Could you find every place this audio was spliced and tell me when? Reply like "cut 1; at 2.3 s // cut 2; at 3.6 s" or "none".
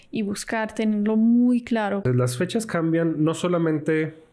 cut 1; at 2.0 s